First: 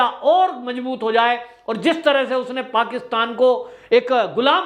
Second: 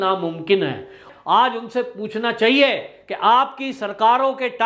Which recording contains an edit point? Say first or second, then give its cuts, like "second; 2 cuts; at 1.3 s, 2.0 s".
second; 1 cut; at 1.0 s